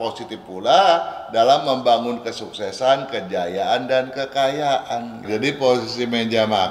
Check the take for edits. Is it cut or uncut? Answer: cut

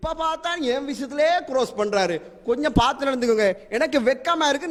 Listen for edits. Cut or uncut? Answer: uncut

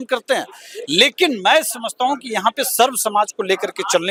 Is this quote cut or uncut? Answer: uncut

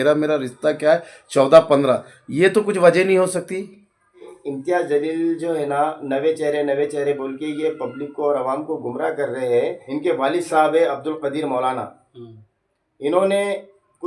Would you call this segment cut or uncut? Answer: cut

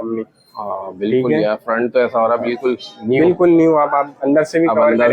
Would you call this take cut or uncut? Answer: uncut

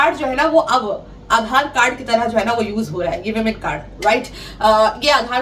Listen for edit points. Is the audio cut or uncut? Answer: uncut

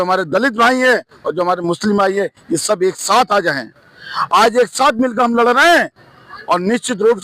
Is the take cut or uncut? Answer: uncut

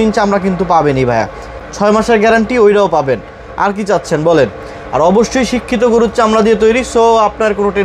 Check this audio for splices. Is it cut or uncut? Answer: uncut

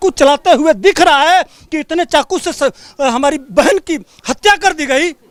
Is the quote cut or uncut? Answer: uncut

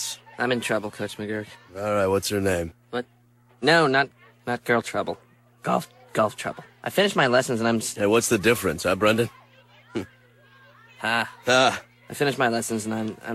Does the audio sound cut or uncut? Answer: cut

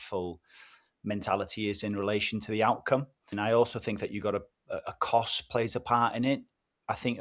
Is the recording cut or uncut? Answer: cut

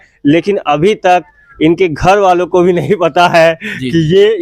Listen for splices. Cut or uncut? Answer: uncut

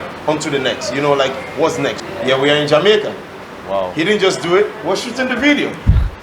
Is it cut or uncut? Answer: cut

